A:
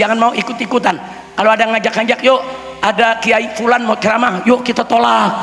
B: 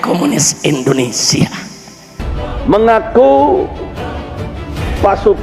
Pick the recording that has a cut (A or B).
B